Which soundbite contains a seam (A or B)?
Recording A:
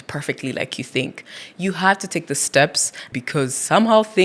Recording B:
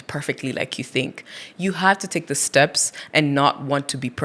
A